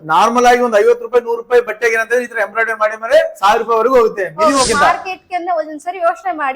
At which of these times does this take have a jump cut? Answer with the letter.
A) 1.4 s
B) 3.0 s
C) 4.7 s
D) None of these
C